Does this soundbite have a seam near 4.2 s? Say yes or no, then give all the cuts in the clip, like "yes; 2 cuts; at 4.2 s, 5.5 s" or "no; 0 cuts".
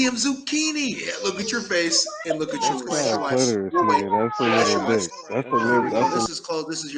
no; 3 cuts; at 1.1 s, 2.9 s, 6.2 s